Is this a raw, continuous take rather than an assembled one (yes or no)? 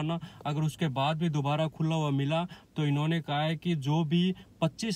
yes